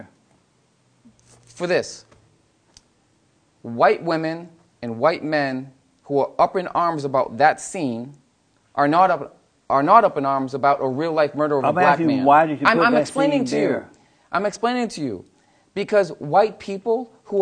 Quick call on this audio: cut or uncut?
cut